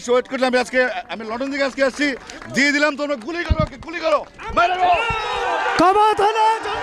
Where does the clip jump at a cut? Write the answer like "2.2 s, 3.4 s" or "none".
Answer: none